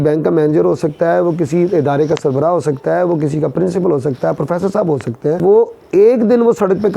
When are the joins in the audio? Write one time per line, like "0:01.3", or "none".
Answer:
0:05.4

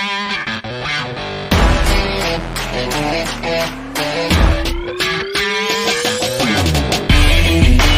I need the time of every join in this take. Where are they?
0:01.2

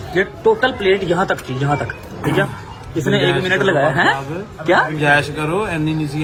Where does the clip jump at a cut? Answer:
none

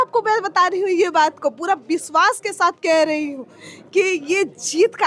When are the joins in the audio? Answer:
none

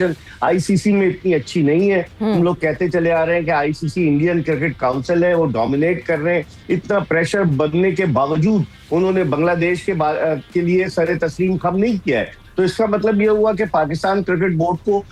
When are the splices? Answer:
none

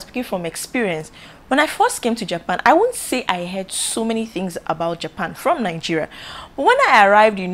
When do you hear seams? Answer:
none

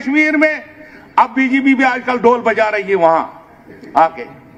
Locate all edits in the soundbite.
none

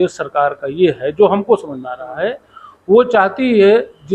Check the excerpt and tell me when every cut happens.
none

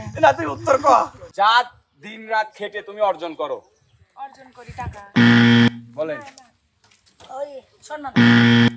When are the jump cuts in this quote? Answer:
0:01.2

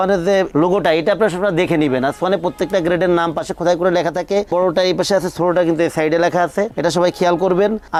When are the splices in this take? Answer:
none

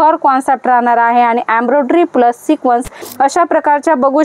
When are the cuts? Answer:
0:03.0

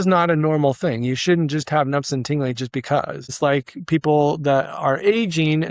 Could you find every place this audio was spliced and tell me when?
0:03.2

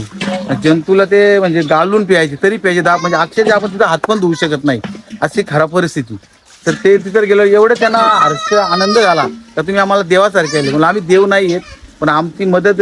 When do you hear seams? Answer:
none

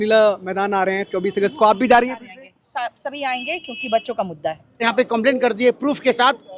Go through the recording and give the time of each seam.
0:04.8

